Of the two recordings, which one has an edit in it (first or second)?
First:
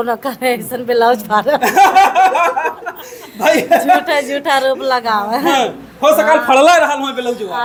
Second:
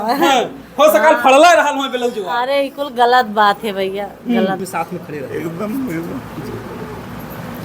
second